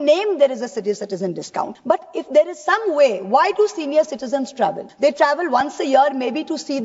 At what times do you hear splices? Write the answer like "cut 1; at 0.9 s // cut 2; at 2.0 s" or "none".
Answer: cut 1; at 1.8 s // cut 2; at 4.9 s